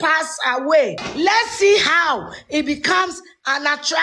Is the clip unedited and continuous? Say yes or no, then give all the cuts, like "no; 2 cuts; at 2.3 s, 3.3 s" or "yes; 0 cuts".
no; 1 cut; at 1.0 s